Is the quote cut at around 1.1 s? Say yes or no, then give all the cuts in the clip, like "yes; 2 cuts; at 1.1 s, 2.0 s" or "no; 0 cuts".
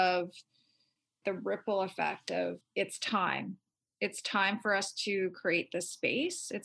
yes; 2 cuts; at 1.1 s, 2.6 s